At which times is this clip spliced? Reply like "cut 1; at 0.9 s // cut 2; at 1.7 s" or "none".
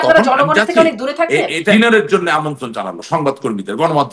cut 1; at 1.7 s